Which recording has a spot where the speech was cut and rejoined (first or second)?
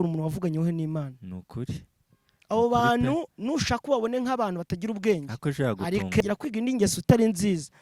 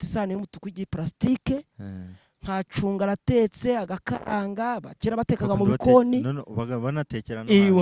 first